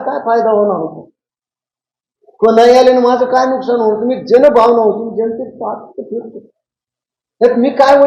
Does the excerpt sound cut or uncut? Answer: uncut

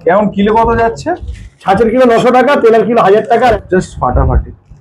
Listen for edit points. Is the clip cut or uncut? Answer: cut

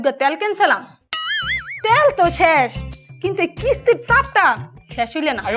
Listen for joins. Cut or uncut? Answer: uncut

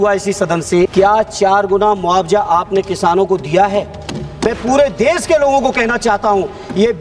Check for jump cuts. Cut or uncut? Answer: cut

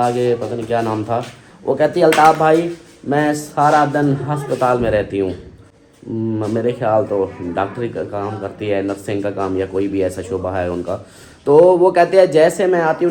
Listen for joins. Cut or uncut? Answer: uncut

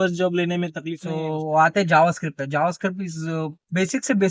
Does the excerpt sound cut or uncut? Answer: cut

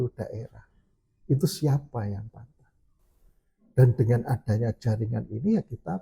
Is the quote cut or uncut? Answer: uncut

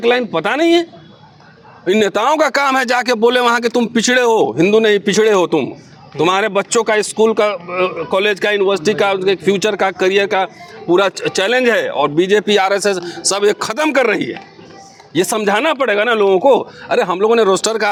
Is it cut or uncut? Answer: uncut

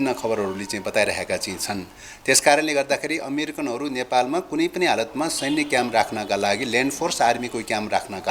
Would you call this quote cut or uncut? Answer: uncut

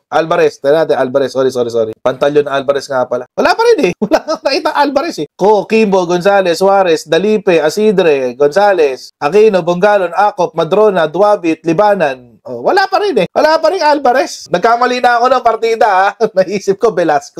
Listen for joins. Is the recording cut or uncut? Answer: uncut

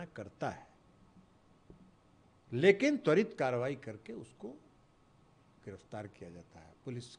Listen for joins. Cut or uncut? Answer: uncut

